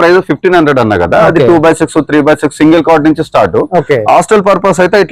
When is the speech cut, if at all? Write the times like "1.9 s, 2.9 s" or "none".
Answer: none